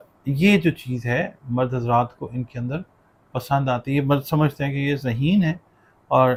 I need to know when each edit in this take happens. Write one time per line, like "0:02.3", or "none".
none